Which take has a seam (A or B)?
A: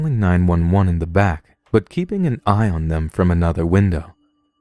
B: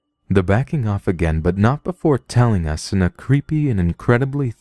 B